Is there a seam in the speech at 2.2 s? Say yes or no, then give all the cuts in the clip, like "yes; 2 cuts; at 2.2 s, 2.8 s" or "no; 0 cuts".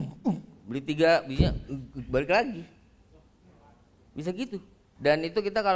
no; 1 cut; at 4.8 s